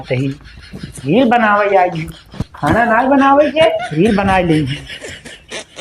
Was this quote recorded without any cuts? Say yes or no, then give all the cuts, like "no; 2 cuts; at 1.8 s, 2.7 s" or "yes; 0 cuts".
no; 1 cut; at 4.9 s